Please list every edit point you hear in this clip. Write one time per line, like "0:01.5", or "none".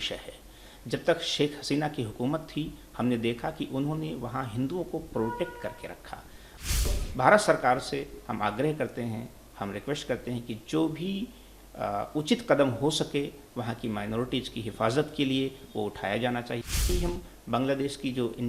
0:06.9
0:16.8